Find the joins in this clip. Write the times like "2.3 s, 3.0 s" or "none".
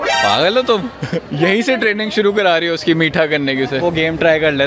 1.2 s, 3.8 s

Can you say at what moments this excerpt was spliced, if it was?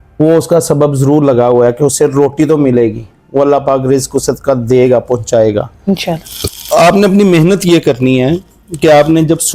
none

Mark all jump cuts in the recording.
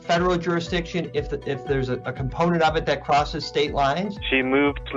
none

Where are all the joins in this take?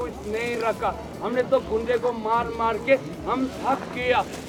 none

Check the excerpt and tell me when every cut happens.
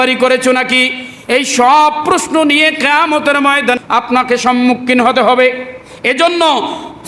3.8 s

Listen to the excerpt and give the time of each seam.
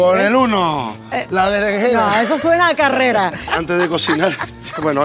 3.5 s

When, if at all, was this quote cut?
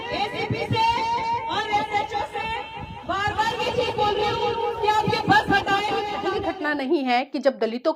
6.4 s

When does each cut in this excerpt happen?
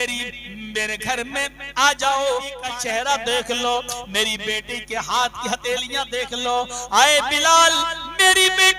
2.6 s

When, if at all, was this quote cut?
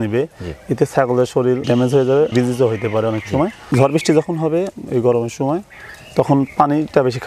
1.6 s, 2.3 s, 3.6 s

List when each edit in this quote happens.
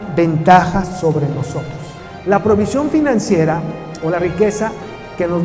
2.1 s

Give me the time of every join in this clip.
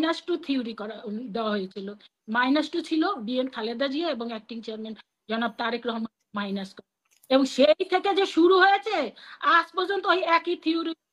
none

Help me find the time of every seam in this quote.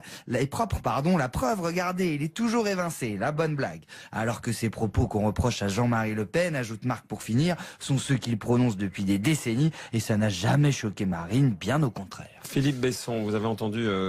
9.4 s

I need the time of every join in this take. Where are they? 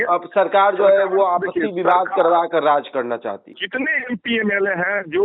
3.5 s

